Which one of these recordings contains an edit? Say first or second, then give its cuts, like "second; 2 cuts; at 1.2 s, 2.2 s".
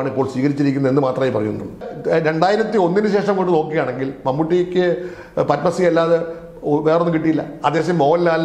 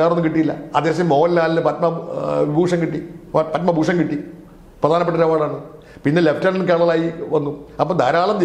first; 1 cut; at 1.9 s